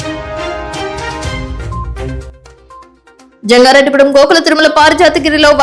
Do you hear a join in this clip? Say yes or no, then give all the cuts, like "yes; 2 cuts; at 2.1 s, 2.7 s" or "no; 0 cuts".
yes; 2 cuts; at 1.1 s, 1.9 s